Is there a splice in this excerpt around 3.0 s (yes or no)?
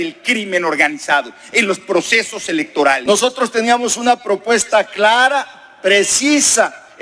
yes